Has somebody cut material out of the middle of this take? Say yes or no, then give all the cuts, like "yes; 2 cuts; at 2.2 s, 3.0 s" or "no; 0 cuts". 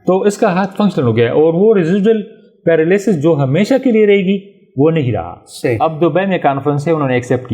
yes; 1 cut; at 5.8 s